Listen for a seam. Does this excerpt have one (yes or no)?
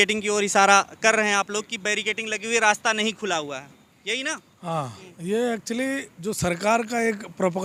no